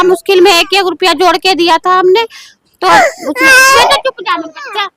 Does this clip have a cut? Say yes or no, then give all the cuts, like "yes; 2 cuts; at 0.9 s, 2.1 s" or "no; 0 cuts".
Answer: no; 0 cuts